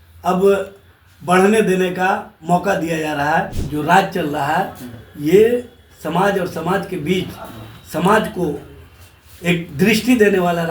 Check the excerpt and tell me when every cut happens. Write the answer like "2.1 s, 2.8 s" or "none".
3.6 s